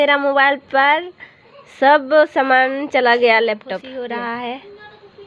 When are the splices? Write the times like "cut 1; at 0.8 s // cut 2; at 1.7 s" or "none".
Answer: cut 1; at 3.9 s